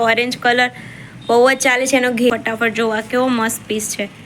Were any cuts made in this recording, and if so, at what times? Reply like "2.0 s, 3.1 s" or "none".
2.3 s